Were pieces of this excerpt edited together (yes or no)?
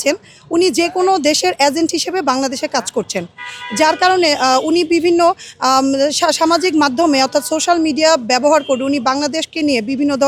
no